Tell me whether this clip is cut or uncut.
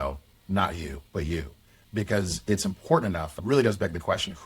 cut